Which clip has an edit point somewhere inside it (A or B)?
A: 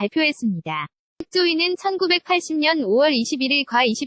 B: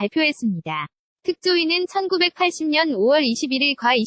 A